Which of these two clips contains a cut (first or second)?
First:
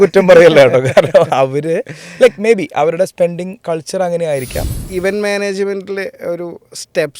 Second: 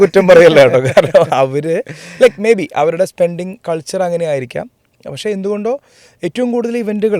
first